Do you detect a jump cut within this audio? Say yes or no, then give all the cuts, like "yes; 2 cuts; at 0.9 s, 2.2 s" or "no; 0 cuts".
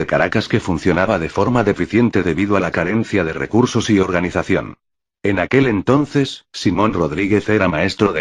no; 0 cuts